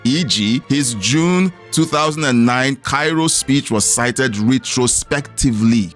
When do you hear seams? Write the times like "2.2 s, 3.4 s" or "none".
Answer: none